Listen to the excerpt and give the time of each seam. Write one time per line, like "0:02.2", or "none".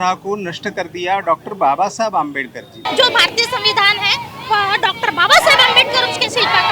0:02.9